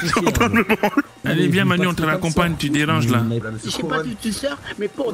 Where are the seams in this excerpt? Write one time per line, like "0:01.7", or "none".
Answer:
0:01.2
0:03.4